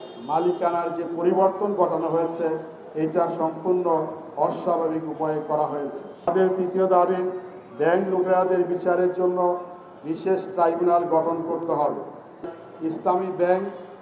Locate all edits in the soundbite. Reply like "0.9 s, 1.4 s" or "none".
6.3 s, 12.4 s